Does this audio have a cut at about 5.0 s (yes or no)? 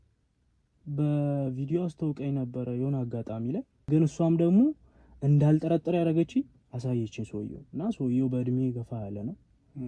no